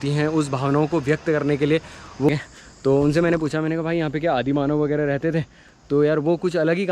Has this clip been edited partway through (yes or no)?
yes